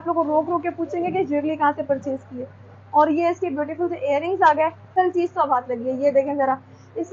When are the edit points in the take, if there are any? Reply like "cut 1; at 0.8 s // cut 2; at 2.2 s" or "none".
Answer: cut 1; at 4.8 s